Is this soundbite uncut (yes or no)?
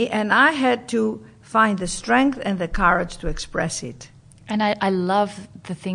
yes